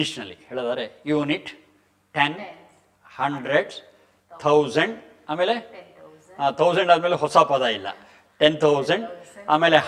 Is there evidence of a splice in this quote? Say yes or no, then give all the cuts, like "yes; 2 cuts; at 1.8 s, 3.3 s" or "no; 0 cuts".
no; 0 cuts